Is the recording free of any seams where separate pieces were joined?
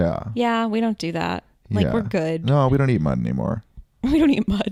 yes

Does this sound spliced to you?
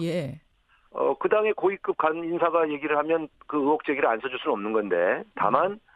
yes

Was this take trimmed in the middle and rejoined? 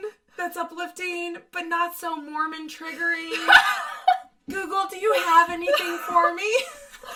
no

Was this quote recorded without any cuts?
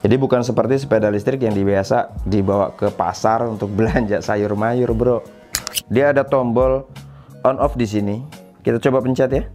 no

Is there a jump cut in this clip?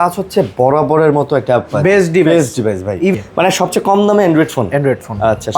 yes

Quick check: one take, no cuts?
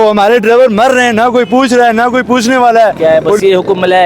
no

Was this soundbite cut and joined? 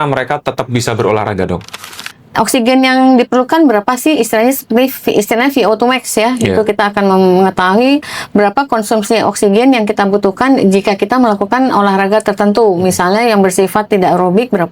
yes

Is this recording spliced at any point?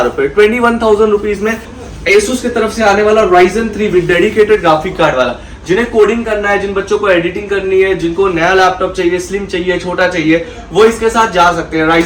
yes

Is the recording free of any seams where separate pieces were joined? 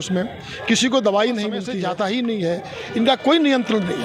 no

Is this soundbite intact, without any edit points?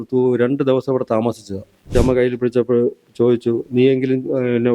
no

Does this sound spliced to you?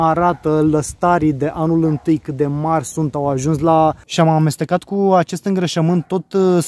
yes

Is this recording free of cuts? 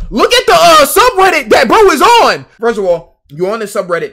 no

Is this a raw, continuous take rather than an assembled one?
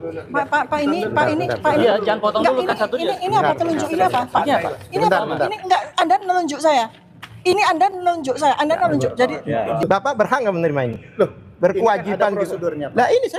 no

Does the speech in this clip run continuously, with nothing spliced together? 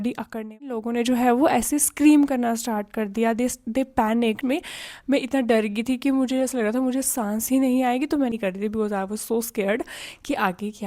no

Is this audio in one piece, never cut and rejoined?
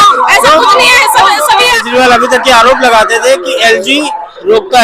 no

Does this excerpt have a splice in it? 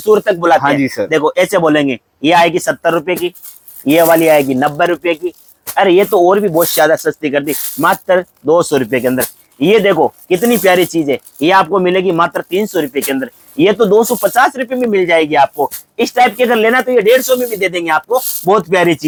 no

